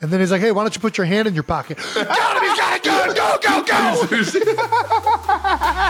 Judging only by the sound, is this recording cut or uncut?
uncut